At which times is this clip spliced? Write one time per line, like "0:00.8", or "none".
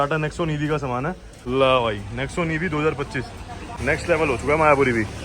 0:01.3
0:03.7